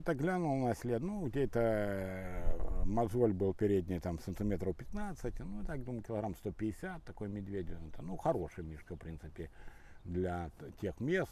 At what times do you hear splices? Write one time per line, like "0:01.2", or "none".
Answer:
none